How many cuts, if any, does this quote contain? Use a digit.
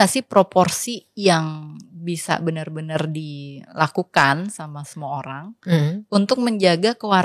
0